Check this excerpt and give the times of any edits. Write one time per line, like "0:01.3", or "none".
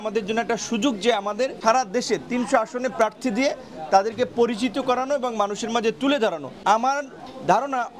0:01.6
0:06.5